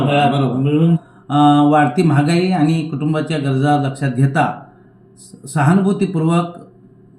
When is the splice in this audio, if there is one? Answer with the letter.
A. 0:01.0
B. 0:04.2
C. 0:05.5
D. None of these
A